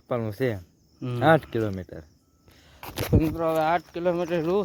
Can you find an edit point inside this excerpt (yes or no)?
no